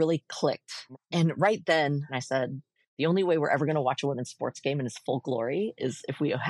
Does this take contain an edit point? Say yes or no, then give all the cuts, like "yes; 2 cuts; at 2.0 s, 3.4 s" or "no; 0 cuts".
yes; 2 cuts; at 1.0 s, 2.1 s